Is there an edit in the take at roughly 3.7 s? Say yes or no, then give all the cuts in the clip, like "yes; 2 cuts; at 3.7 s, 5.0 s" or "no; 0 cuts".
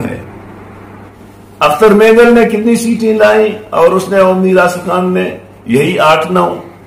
no; 1 cut; at 1.1 s